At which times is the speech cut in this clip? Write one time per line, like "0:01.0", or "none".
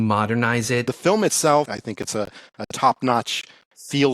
0:00.9
0:01.8